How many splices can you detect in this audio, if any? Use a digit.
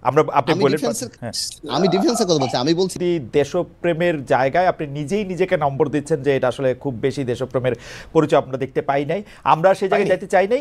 1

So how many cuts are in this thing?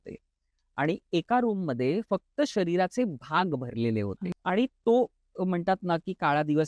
1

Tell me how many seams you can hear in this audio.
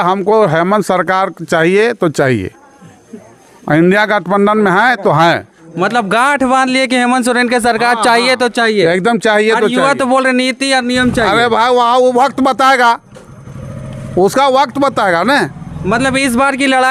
0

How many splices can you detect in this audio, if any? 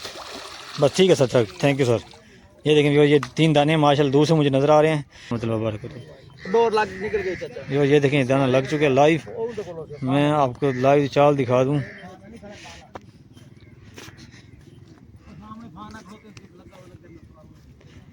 1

